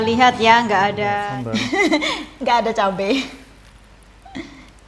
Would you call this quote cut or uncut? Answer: cut